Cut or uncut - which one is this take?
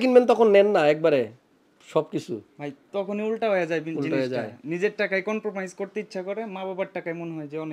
uncut